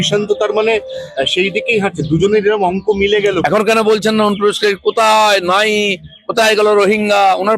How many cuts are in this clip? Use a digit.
1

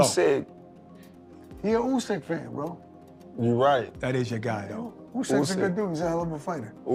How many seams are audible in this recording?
0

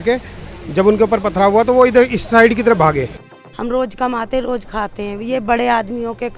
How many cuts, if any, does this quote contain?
1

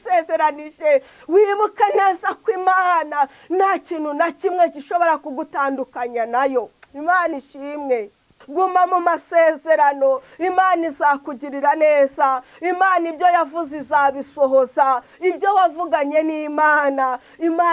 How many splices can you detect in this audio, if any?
1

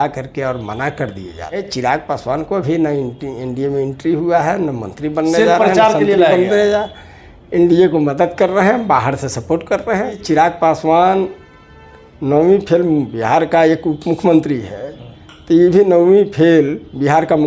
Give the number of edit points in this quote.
2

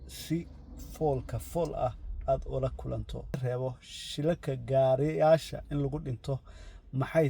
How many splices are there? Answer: 1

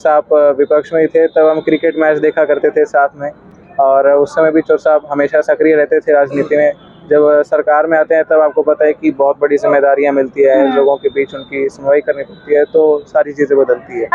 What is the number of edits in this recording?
0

